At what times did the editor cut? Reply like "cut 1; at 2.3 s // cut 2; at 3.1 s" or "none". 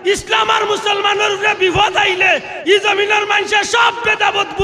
none